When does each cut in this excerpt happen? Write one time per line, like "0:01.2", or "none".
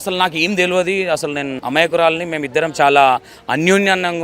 0:01.6